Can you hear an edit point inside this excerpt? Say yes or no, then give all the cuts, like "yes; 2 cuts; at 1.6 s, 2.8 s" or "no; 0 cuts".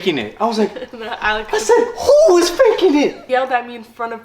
yes; 1 cut; at 3.2 s